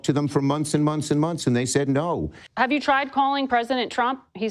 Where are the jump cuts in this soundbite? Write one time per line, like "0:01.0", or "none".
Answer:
0:02.4